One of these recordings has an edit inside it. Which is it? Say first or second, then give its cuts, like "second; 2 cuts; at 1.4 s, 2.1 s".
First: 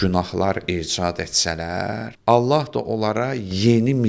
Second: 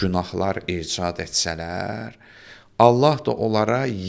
first; 1 cut; at 2.1 s